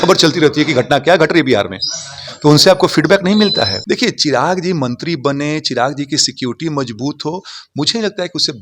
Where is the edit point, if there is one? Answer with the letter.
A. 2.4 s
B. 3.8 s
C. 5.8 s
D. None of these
B